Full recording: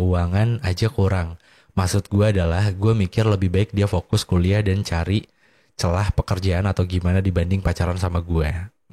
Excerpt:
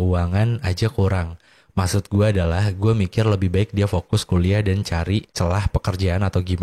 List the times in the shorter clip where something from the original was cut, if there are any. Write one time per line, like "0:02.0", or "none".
0:05.3